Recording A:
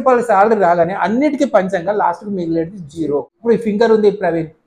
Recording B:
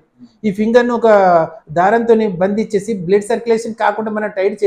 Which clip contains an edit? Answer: A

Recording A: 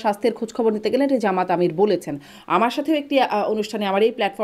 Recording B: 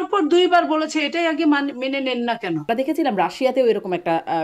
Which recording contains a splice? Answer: B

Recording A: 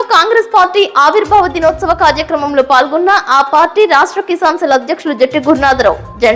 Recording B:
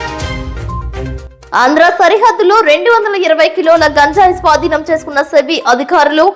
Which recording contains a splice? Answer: B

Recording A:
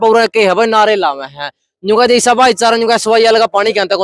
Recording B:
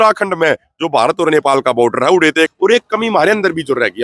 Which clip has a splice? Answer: B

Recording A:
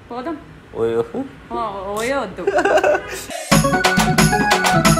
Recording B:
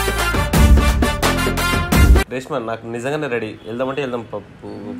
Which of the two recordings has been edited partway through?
B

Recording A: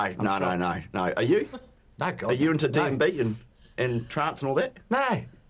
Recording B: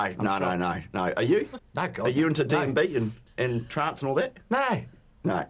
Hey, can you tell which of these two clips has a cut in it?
B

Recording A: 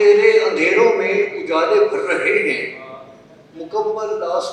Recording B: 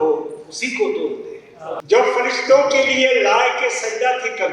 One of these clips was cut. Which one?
B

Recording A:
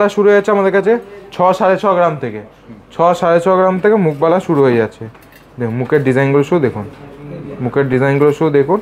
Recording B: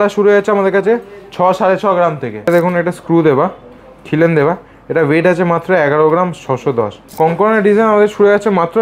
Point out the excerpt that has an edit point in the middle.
B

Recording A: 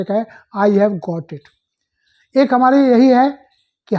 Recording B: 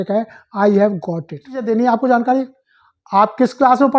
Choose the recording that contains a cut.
B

